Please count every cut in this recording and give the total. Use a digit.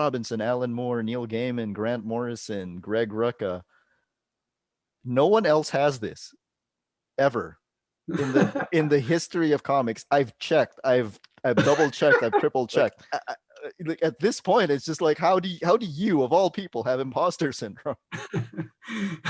1